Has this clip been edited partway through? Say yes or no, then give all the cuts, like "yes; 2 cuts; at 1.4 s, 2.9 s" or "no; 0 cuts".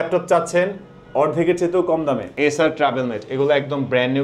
yes; 1 cut; at 2.3 s